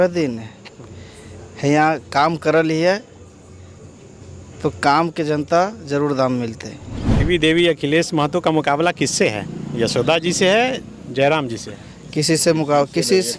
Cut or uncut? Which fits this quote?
cut